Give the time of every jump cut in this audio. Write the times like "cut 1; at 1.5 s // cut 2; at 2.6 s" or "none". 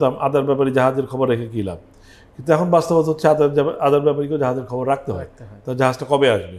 none

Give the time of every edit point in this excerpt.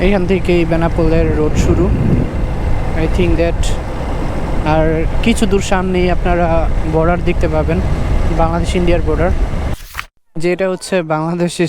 cut 1; at 9.8 s

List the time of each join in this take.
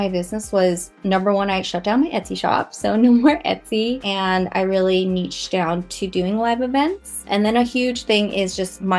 cut 1; at 4.1 s // cut 2; at 7.2 s

